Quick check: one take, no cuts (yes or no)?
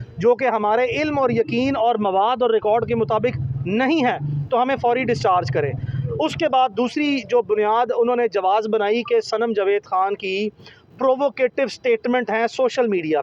yes